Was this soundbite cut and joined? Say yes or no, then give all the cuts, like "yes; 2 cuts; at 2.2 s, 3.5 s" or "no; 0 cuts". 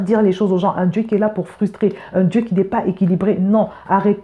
no; 0 cuts